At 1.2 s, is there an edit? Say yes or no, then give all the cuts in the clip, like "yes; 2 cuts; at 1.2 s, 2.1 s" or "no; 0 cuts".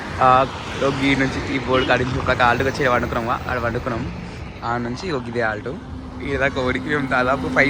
no; 0 cuts